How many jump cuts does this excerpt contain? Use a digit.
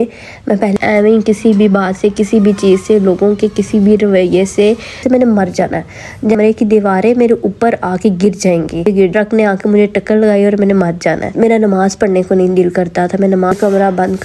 5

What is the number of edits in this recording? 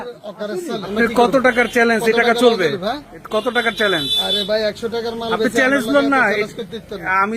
1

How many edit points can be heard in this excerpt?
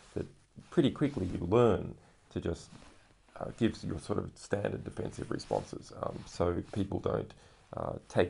1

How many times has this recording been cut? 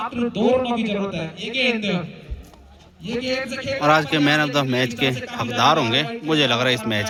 0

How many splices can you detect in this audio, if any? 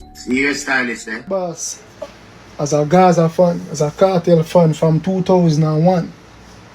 1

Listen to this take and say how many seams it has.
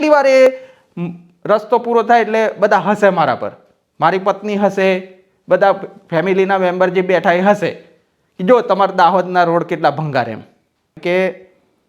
1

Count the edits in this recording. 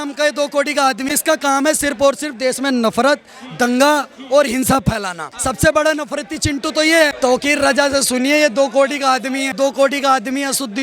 4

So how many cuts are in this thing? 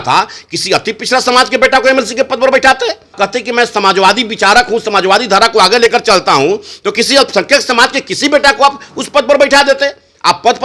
1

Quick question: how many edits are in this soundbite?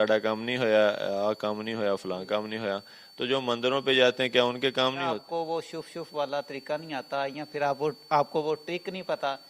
1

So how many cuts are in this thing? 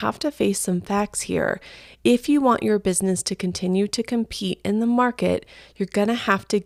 0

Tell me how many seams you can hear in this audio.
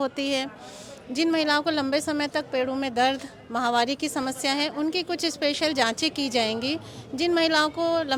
0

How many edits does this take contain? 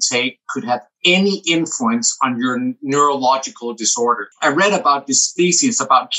2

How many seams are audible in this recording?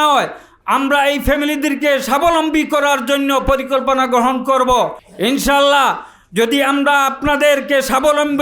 1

